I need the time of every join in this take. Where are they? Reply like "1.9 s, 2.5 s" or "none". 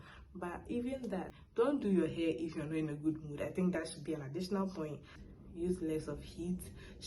1.4 s, 5.1 s